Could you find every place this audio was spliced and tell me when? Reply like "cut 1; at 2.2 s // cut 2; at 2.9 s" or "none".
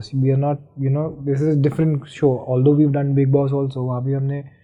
none